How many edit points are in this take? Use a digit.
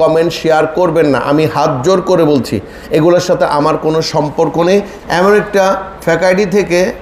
1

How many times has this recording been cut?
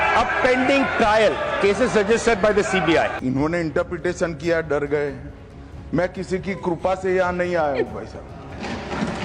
1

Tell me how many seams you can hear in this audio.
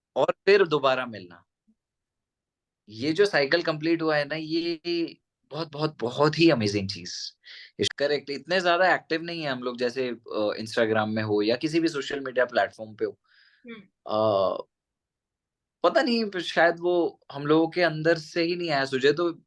1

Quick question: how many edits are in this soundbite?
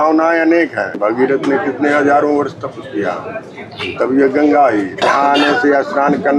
2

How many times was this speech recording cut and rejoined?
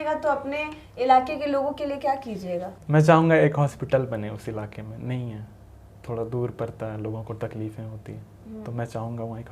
1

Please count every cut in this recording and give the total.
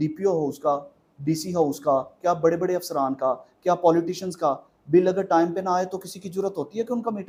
0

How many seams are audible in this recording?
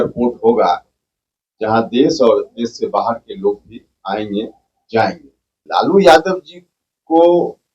1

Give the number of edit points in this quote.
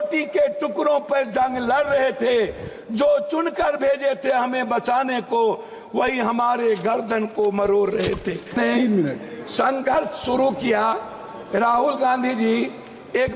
1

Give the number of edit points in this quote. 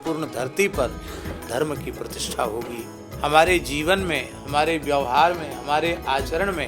1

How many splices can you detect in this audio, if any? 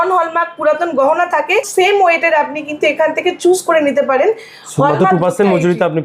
1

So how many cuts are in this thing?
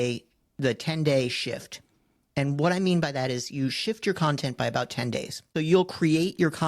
1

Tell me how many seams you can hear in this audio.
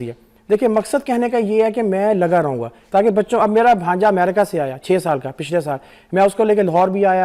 1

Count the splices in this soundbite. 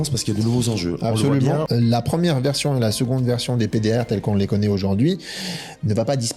1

